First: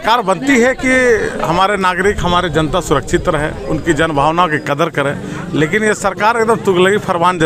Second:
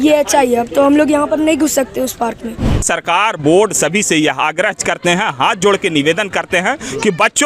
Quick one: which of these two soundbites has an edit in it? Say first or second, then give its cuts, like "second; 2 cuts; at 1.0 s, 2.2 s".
second; 1 cut; at 2.8 s